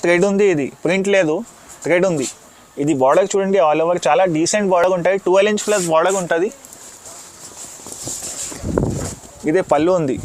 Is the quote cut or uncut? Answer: uncut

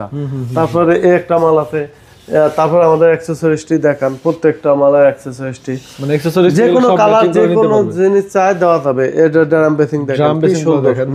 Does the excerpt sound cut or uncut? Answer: uncut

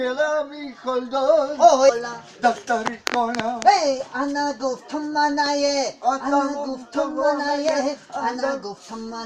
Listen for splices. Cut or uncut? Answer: uncut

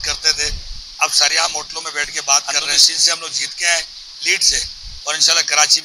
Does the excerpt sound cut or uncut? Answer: cut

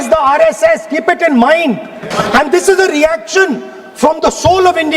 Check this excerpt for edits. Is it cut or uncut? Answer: cut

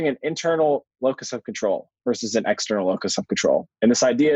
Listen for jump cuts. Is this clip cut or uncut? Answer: uncut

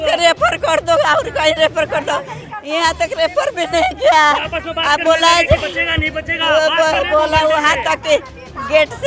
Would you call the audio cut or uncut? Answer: uncut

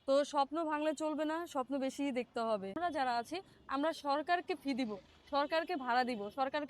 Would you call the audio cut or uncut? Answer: cut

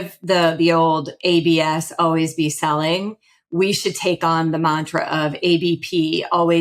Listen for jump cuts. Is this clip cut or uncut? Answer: uncut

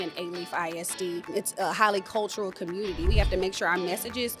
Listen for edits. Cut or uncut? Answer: cut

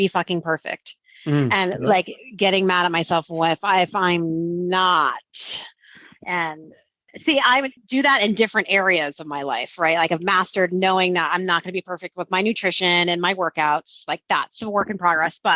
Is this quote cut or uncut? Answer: cut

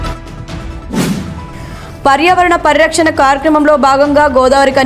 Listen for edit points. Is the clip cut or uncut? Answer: uncut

